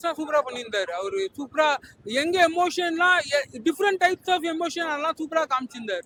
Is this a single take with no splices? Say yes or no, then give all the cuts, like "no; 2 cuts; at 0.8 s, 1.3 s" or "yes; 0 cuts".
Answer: yes; 0 cuts